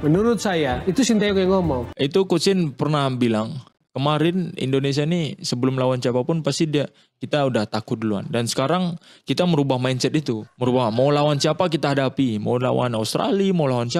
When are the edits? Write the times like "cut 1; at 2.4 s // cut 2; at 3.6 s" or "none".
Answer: cut 1; at 1.9 s // cut 2; at 10.5 s